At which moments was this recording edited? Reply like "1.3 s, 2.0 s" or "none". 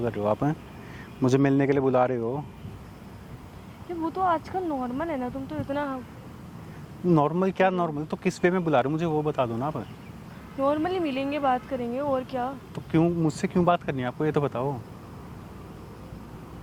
none